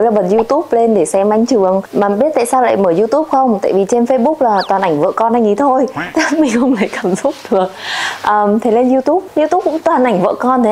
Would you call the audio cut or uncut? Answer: uncut